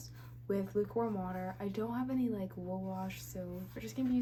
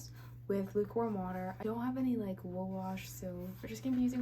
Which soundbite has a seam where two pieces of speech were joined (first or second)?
second